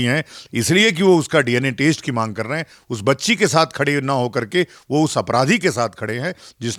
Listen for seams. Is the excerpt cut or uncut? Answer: uncut